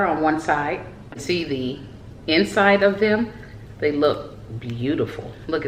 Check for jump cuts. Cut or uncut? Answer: cut